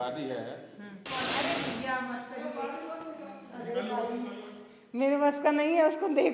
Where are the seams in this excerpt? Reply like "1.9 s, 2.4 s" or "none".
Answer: 1.1 s